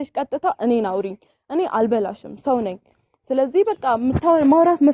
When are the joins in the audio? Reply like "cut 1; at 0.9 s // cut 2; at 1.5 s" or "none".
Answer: none